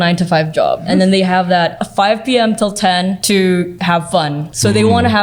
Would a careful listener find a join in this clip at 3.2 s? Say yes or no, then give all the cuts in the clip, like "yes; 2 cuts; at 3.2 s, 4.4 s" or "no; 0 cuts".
yes; 4 cuts; at 0.8 s, 1.8 s, 3.2 s, 4.1 s